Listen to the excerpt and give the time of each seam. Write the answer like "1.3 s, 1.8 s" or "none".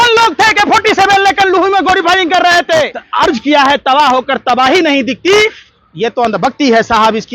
3.0 s